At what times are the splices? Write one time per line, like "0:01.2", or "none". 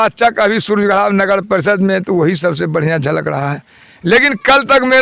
none